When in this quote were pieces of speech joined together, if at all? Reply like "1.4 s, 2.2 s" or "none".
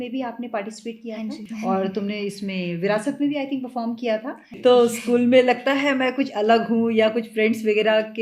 1.5 s, 4.4 s